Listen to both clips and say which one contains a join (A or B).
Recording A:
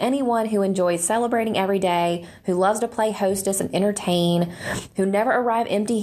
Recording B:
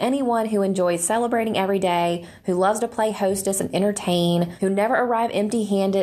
B